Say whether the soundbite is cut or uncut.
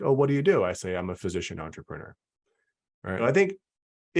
cut